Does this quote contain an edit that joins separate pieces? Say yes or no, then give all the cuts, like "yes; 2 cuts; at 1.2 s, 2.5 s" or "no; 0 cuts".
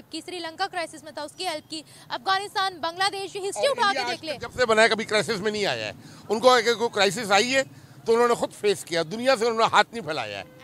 no; 0 cuts